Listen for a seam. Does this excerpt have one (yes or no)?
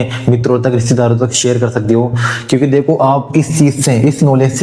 no